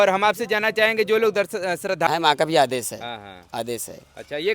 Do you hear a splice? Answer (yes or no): yes